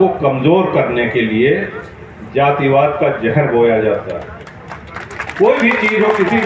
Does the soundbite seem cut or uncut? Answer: uncut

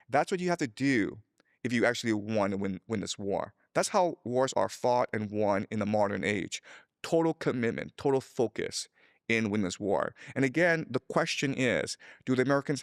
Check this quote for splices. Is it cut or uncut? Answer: uncut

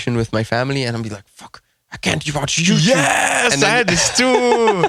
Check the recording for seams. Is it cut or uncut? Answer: uncut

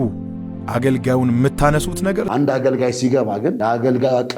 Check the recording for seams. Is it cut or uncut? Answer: cut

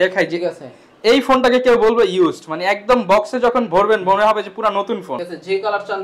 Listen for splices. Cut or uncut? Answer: cut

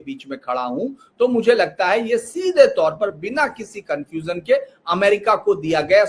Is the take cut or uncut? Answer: uncut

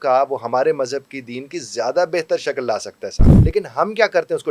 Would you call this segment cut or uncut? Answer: cut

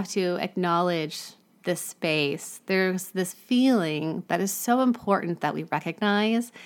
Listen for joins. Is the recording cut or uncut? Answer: uncut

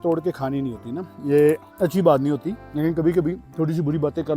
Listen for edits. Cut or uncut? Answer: cut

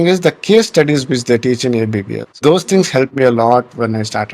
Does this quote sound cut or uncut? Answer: cut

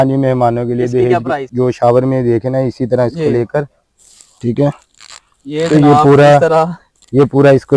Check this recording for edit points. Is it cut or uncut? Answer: cut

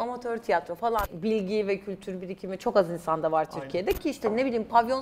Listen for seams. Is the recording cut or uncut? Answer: cut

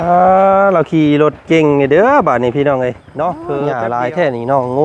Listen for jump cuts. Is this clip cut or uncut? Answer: cut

